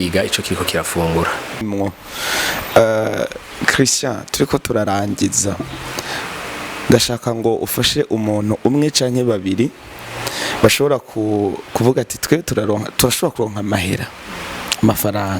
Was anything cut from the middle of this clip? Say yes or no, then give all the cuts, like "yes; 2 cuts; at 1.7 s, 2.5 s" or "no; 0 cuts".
yes; 1 cut; at 1.6 s